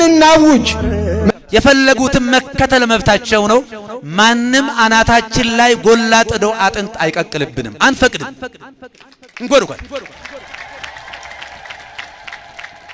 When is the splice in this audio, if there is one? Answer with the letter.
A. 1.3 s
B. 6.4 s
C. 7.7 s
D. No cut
A